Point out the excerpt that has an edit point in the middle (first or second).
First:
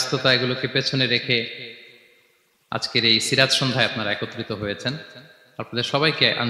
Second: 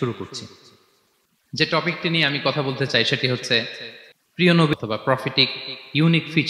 second